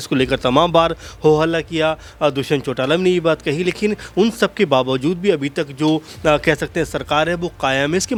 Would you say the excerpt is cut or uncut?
uncut